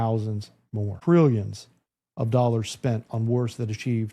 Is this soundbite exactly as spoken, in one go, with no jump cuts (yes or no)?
no